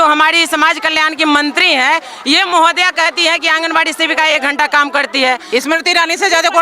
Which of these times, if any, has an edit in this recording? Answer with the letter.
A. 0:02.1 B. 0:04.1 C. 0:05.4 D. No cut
C